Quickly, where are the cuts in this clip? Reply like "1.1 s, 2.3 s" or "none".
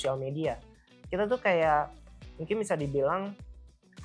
none